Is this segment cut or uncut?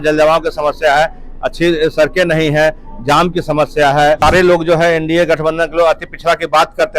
cut